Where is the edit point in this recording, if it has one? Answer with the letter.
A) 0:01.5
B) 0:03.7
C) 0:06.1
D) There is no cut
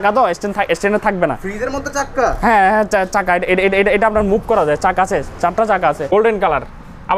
C